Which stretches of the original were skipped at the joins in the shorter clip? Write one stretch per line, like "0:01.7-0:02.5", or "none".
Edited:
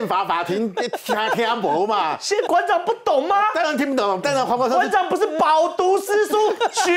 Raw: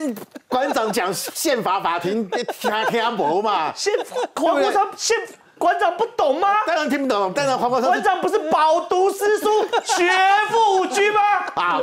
0:04.0-0:05.6